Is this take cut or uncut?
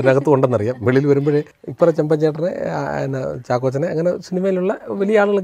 cut